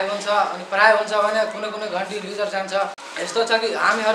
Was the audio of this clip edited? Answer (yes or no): yes